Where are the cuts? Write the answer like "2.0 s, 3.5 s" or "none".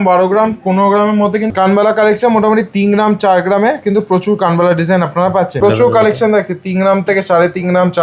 1.5 s, 5.6 s